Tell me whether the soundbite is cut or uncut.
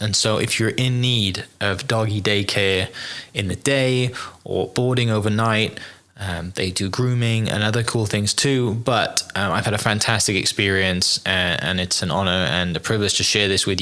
uncut